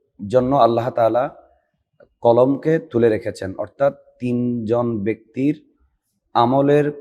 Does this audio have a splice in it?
no; 0 cuts

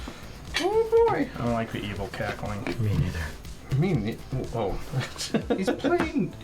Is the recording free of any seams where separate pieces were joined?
yes; 0 cuts

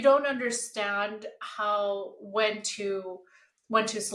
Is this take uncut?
yes; 0 cuts

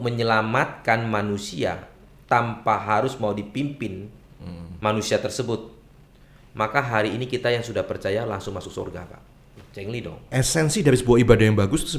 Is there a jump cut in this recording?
yes; 1 cut; at 10.2 s

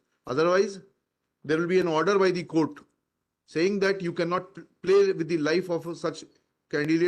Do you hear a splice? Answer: no; 0 cuts

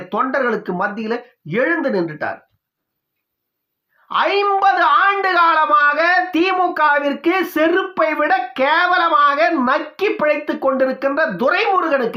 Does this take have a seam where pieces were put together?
no; 0 cuts

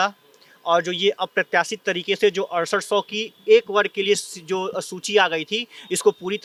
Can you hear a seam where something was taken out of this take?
no; 0 cuts

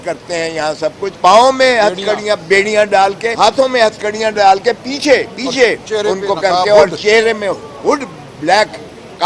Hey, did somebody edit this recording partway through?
yes; 2 cuts; at 1.1 s, 3.3 s

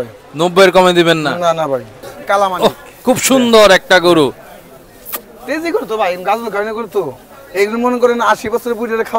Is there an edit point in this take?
yes; 1 cut; at 2.0 s

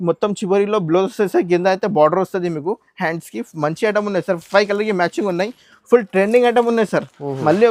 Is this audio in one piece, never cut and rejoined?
yes; 0 cuts

